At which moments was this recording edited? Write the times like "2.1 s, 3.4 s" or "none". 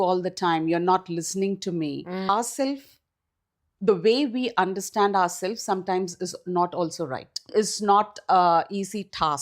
2.3 s, 7.5 s